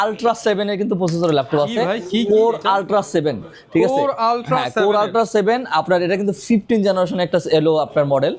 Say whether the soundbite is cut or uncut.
uncut